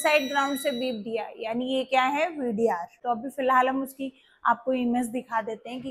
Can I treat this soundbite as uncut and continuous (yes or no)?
no